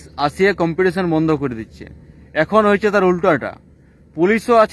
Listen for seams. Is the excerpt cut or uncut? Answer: uncut